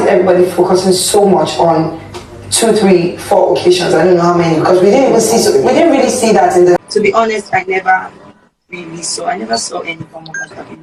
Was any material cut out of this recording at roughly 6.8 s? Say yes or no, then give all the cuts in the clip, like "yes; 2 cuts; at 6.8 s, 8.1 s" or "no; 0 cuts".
yes; 1 cut; at 6.8 s